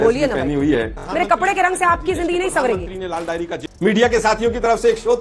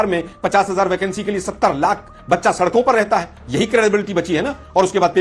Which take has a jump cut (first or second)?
first